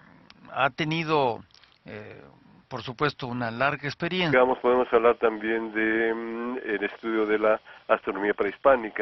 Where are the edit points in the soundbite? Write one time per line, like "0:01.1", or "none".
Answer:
none